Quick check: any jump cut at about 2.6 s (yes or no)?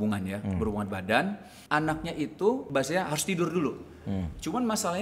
yes